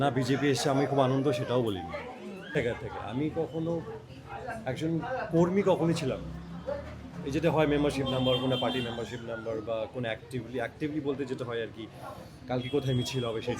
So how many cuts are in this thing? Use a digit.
1